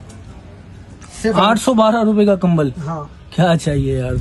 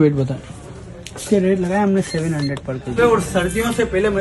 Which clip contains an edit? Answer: second; 1 cut; at 3.0 s

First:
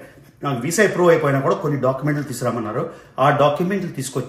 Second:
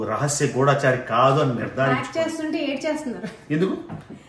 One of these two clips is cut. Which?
second; 1 cut; at 2.0 s

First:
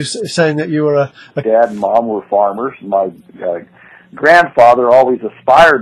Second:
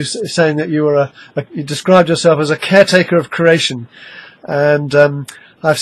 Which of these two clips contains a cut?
second; 1 cut; at 1.4 s

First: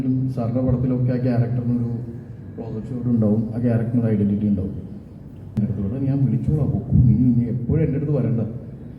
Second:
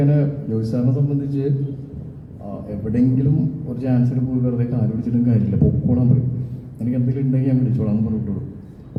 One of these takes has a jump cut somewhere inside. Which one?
first; 1 cut; at 5.6 s

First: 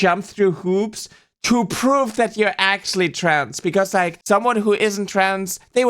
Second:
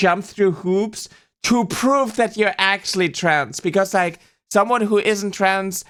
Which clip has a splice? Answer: first; 1 cut; at 4.2 s

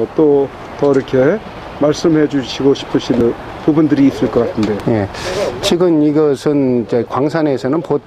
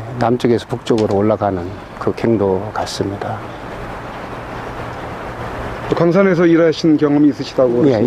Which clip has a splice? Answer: first; 1 cut; at 1.6 s

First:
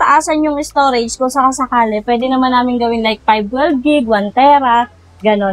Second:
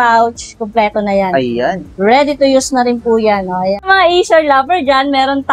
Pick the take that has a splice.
second; 1 cut; at 3.8 s

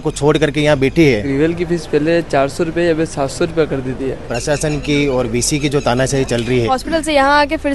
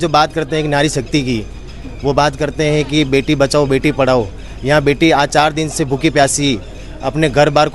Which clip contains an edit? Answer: first; 3 cuts; at 1.3 s, 4.3 s, 6.7 s

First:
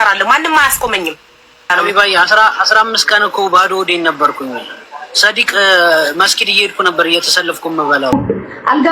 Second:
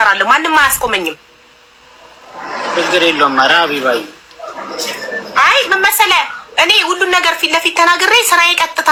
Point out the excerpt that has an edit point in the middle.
first; 2 cuts; at 1.7 s, 8.1 s

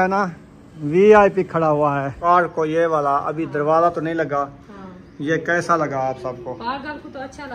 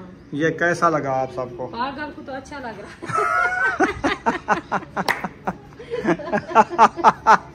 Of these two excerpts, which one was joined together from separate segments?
first; 1 cut; at 2.2 s

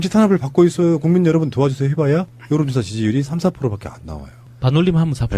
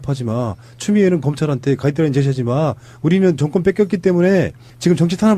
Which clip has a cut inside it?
second; 1 cut; at 1.5 s

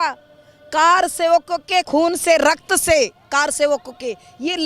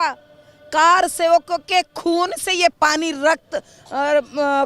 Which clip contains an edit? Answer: first; 1 cut; at 1.9 s

